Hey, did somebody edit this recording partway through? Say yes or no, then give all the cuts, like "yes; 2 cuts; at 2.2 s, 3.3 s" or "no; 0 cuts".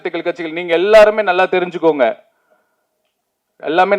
no; 0 cuts